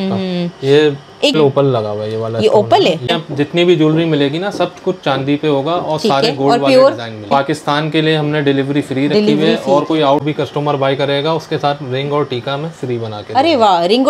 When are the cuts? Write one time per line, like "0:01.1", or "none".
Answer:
0:01.4
0:03.1
0:07.3
0:10.2